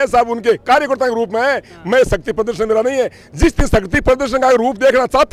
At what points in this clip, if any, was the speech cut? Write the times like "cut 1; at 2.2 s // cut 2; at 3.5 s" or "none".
none